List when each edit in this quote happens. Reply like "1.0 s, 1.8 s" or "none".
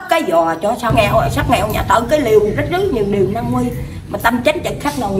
0.9 s